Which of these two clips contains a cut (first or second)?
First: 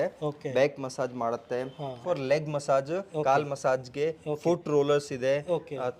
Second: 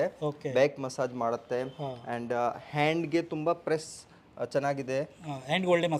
first